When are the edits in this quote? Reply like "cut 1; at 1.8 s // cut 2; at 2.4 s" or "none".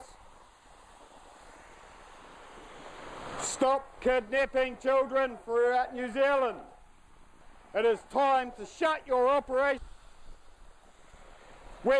none